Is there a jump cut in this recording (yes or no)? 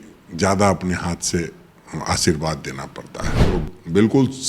yes